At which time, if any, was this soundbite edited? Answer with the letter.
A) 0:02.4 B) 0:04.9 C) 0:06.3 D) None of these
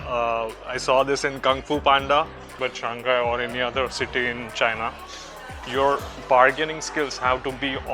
A